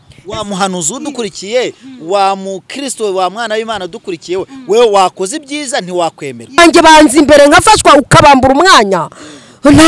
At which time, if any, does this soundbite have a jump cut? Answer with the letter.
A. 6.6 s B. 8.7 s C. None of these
A